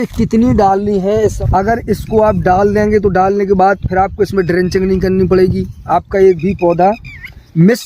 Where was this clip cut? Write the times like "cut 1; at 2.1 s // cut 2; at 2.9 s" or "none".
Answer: cut 1; at 1.4 s